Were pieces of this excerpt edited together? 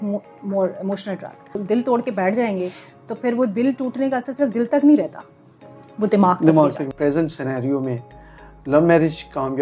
yes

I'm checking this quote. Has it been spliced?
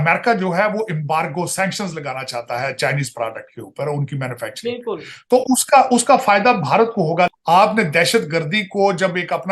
yes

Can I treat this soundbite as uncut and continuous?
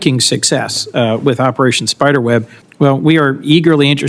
no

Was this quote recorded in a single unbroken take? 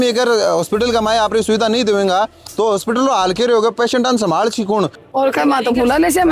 no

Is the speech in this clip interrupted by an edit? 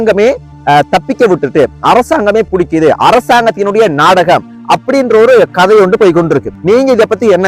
yes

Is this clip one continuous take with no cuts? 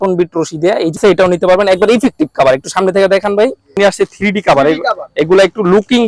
no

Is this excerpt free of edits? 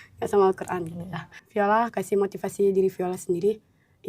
no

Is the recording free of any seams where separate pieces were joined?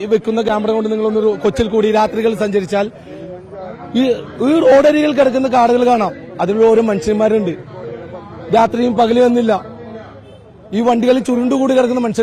yes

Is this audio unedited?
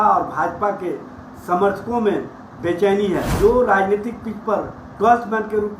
no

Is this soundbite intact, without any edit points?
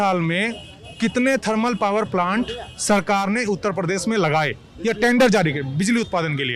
yes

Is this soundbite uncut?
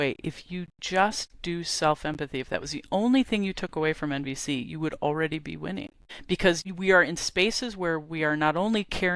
no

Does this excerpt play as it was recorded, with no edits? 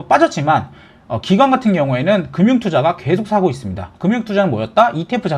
yes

